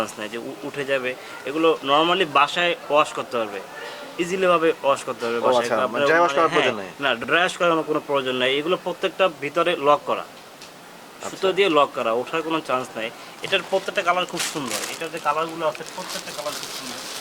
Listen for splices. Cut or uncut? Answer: uncut